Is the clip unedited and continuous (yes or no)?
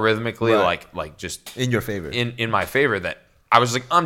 yes